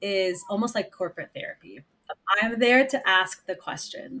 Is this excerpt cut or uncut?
cut